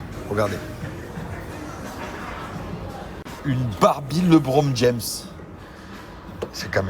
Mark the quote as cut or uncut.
cut